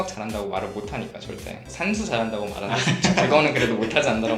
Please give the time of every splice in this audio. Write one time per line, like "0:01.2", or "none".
none